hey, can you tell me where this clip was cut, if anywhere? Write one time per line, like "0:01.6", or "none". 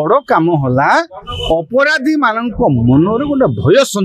none